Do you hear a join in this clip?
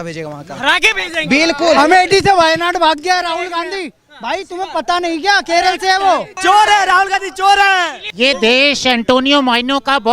yes; 3 cuts; at 1.8 s, 6.3 s, 8.0 s

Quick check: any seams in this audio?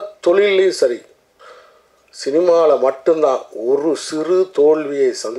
no; 0 cuts

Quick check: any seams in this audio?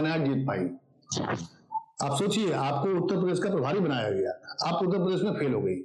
no; 0 cuts

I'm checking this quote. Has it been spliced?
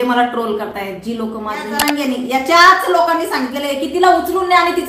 yes; 1 cut; at 1.7 s

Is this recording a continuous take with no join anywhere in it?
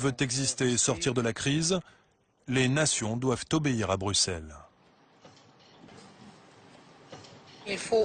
no; 1 cut; at 5.9 s

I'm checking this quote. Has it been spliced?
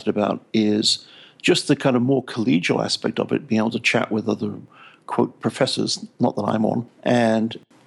no; 0 cuts

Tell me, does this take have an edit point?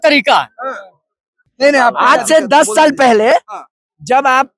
yes; 1 cut; at 1.4 s

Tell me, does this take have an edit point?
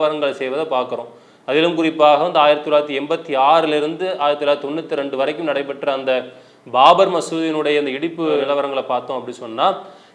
no; 0 cuts

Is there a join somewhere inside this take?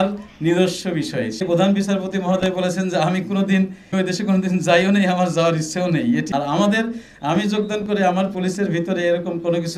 yes; 3 cuts; at 1.4 s, 3.9 s, 6.3 s

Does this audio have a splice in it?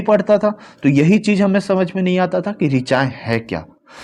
no; 0 cuts

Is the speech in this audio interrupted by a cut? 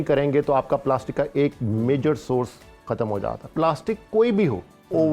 yes; 1 cut; at 3.5 s

